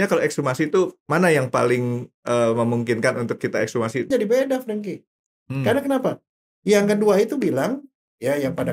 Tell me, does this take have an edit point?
yes; 1 cut; at 4.1 s

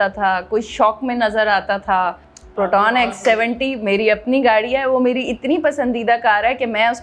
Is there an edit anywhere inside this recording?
yes; 1 cut; at 2.3 s

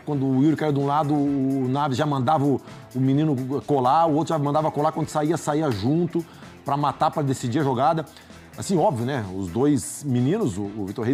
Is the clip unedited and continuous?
yes; 0 cuts

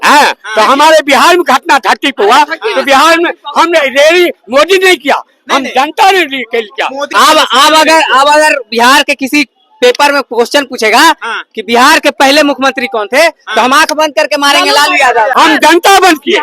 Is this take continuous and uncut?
no; 2 cuts; at 7.0 s, 15.3 s

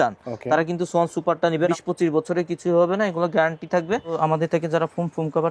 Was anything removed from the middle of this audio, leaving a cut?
yes; 2 cuts; at 1.7 s, 4.1 s

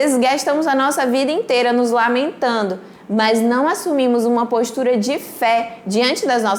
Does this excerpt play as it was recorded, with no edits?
yes; 0 cuts

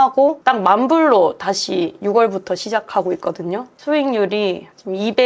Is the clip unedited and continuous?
yes; 0 cuts

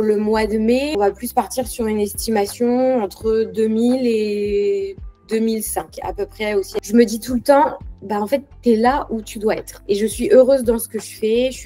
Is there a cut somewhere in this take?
yes; 2 cuts; at 0.9 s, 6.7 s

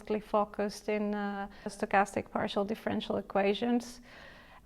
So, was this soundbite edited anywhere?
yes; 1 cut; at 1.8 s

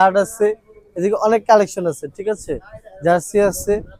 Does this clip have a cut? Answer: no; 0 cuts

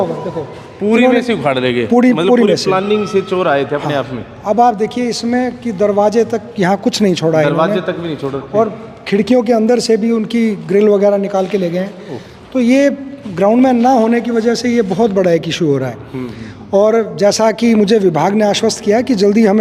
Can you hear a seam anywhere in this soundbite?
no; 0 cuts

